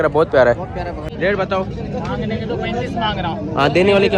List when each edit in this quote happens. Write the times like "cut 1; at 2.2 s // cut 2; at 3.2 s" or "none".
cut 1; at 1.1 s